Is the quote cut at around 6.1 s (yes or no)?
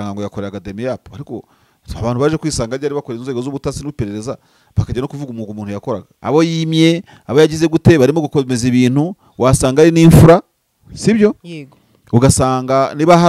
yes